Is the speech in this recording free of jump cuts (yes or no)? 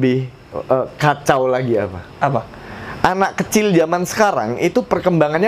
yes